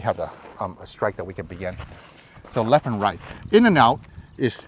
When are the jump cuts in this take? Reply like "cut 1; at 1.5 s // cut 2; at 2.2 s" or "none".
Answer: none

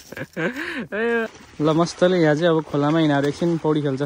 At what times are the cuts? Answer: cut 1; at 1.3 s

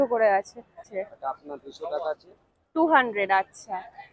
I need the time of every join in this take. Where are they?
cut 1; at 1.0 s

